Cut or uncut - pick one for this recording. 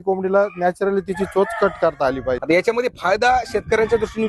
cut